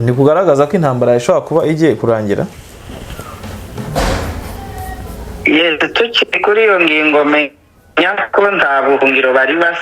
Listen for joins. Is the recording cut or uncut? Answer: uncut